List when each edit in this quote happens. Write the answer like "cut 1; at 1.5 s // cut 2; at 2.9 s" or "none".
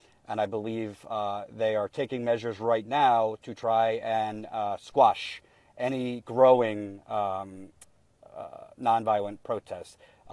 cut 1; at 2.4 s